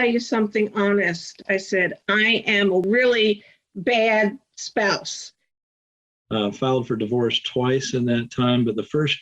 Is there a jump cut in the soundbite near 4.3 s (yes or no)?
no